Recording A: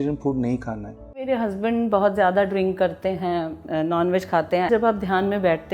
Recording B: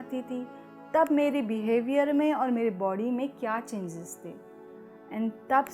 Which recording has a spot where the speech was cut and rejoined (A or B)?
A